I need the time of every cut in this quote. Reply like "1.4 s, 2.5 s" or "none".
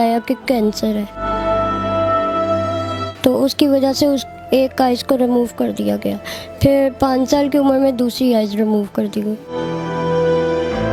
none